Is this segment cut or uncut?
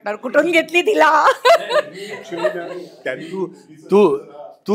uncut